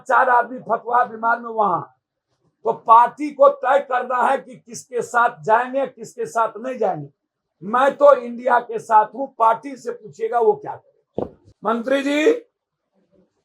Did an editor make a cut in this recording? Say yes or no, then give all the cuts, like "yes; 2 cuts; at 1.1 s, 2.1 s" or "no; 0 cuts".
yes; 1 cut; at 11.4 s